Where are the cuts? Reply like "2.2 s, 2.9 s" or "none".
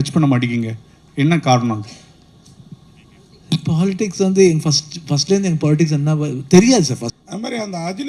7.1 s